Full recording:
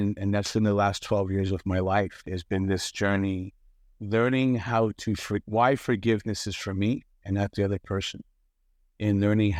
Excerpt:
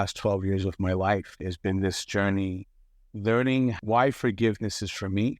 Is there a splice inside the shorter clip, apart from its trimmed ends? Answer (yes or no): yes